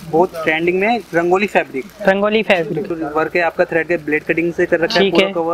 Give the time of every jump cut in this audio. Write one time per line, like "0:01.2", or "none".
0:02.9